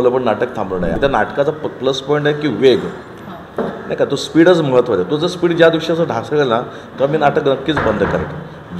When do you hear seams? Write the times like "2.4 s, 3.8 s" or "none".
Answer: 0.9 s